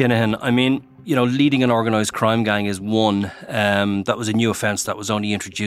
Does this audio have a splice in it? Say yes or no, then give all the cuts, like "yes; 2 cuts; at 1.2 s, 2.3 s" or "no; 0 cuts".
yes; 1 cut; at 0.9 s